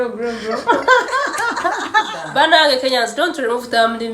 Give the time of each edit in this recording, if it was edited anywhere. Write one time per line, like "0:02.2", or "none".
0:02.2